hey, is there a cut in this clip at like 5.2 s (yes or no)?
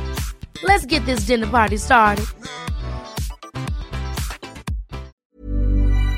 yes